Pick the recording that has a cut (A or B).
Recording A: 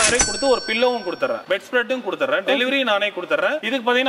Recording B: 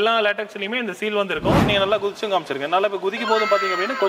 B